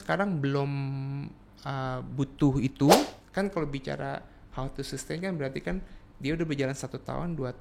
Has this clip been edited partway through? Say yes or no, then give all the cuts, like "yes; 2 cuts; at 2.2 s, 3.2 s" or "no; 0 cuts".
yes; 1 cut; at 3.1 s